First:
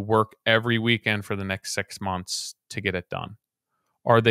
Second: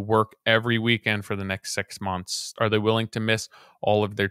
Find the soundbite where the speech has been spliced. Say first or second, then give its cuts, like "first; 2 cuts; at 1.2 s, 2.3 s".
second; 1 cut; at 2.5 s